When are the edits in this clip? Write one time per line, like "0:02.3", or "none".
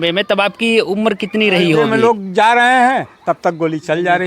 0:01.9